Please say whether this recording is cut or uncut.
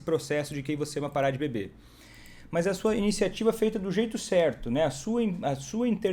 uncut